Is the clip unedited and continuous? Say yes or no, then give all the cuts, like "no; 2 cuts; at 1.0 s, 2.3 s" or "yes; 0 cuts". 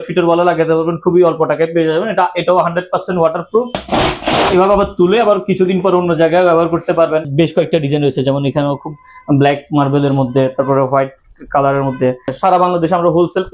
no; 3 cuts; at 3.8 s, 7.3 s, 12.3 s